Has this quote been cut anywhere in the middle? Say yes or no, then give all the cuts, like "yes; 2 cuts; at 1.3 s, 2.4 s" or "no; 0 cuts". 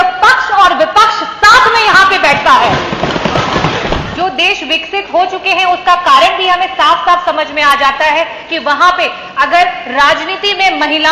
yes; 1 cut; at 4.0 s